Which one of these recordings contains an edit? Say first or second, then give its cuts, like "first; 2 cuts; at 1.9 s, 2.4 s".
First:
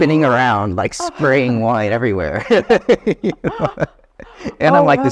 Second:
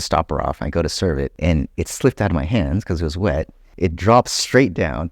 second; 2 cuts; at 1.3 s, 3.6 s